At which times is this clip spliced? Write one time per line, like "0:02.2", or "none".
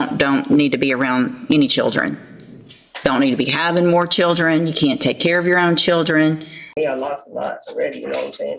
0:06.6